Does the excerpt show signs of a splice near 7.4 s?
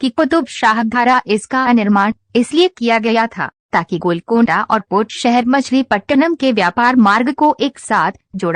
no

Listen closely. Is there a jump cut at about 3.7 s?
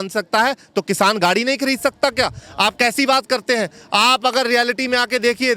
no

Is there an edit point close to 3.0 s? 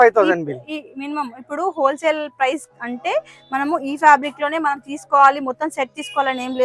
no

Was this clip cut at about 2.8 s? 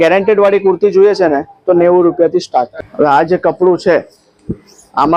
yes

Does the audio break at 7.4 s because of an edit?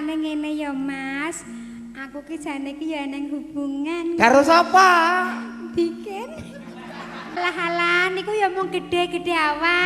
yes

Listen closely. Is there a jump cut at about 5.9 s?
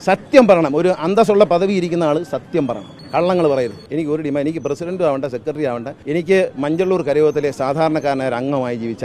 yes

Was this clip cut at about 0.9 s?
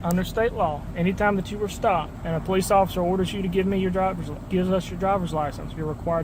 yes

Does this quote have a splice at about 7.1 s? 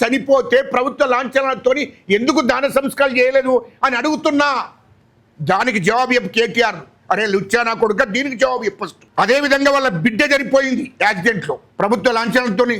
no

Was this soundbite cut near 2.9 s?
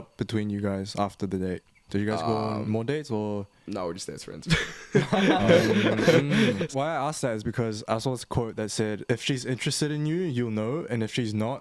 no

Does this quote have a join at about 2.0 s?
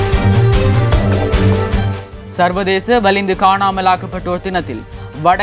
yes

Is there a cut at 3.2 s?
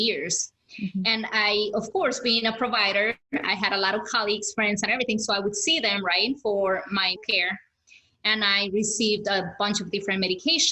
yes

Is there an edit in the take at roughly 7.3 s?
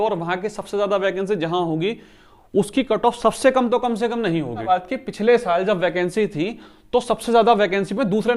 no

